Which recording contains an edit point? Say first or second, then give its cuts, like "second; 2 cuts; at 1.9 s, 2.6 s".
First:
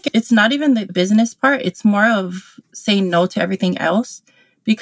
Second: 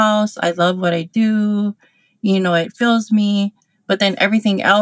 first; 1 cut; at 0.9 s